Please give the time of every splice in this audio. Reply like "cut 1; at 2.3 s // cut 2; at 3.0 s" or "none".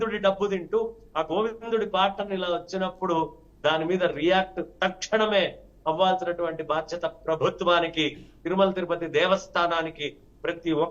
none